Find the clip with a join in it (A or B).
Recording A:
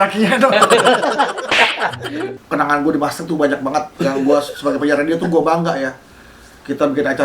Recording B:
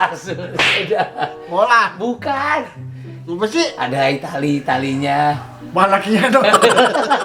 A